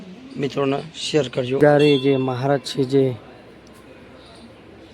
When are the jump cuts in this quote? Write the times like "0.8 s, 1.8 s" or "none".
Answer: 1.6 s